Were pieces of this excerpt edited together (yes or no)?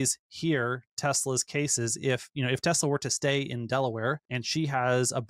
yes